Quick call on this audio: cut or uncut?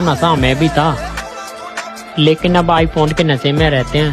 uncut